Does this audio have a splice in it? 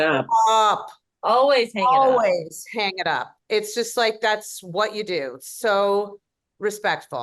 no; 0 cuts

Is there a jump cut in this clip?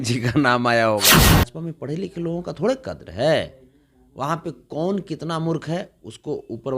yes; 1 cut; at 1.2 s

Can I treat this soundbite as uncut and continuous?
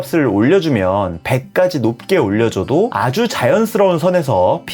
yes; 0 cuts

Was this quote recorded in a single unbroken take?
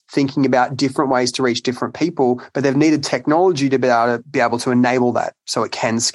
yes; 0 cuts

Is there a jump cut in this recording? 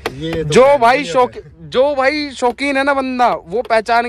no; 0 cuts

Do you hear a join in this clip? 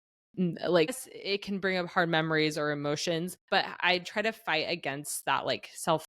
yes; 2 cuts; at 1.1 s, 3.4 s

